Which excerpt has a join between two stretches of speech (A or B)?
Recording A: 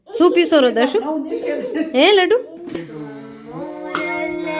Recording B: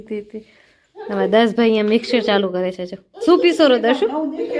A